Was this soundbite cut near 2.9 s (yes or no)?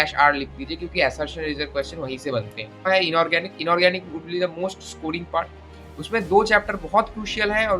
yes